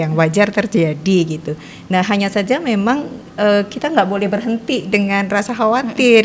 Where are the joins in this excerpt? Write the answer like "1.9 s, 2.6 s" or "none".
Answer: none